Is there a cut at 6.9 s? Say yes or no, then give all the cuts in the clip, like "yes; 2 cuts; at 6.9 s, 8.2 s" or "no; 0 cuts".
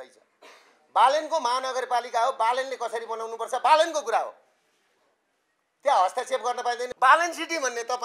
yes; 1 cut; at 6.9 s